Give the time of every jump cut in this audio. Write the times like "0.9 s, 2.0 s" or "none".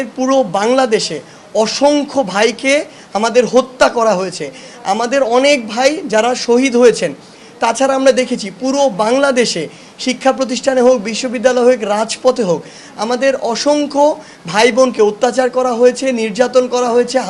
none